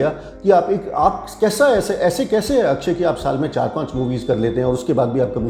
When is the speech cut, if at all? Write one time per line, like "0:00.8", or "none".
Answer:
none